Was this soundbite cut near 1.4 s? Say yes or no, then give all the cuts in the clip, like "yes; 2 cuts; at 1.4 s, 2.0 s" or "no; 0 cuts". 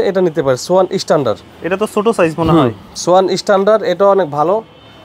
no; 0 cuts